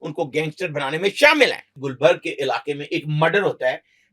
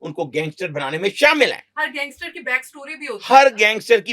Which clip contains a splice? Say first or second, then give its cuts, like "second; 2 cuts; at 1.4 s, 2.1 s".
first; 1 cut; at 1.8 s